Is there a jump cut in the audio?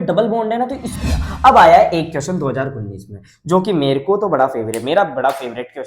yes; 1 cut; at 0.9 s

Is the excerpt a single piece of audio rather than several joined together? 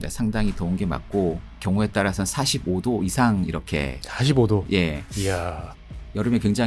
no; 1 cut; at 1.5 s

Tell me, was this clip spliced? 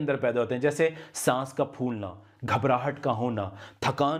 no; 0 cuts

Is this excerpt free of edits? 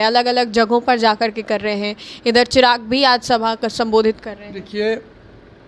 yes; 0 cuts

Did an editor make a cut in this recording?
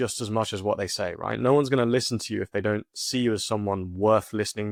no; 0 cuts

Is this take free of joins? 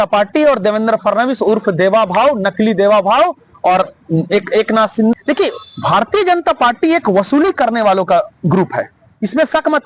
no; 1 cut; at 5.1 s

